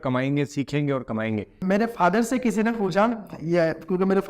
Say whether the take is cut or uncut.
cut